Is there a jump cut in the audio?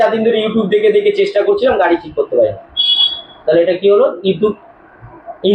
no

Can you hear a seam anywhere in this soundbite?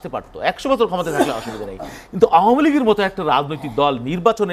no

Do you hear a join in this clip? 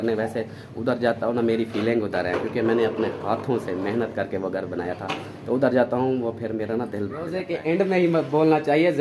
yes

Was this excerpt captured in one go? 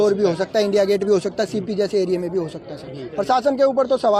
yes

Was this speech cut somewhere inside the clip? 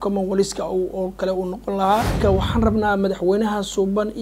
yes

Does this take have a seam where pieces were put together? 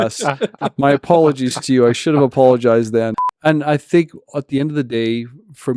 yes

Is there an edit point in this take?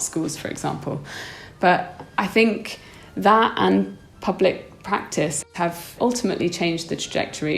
yes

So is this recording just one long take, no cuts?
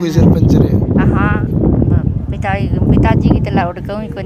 yes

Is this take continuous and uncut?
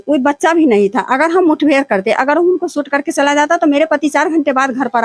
yes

